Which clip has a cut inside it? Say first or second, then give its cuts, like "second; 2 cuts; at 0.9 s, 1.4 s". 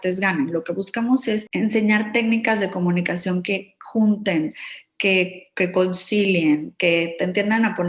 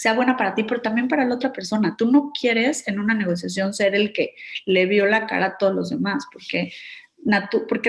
first; 1 cut; at 1.5 s